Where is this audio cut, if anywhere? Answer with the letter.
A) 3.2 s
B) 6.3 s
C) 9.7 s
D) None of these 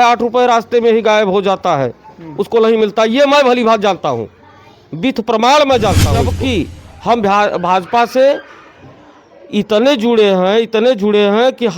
B